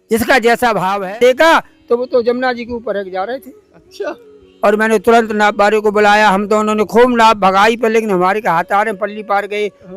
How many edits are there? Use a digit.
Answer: 1